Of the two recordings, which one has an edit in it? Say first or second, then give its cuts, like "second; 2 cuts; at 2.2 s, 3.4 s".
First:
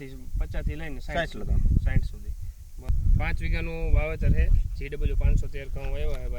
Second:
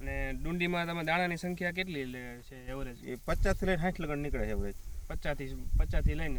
first; 1 cut; at 2.9 s